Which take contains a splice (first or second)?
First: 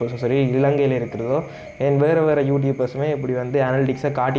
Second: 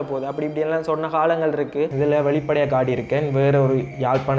second